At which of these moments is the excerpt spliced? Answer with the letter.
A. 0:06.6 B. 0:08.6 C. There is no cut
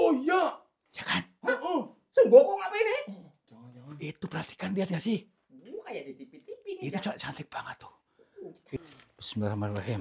B